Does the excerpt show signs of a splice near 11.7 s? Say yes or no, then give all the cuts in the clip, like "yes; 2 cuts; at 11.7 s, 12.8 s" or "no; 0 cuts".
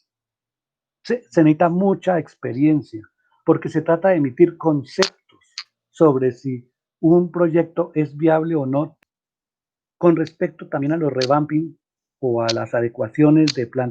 no; 1 cut; at 8.9 s